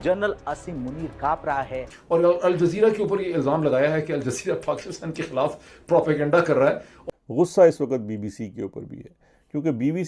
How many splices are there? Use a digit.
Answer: 1